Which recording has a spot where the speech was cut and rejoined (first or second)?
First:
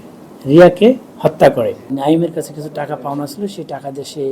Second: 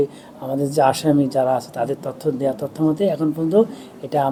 first